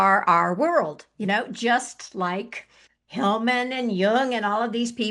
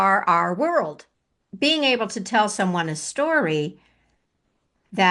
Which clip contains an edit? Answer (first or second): second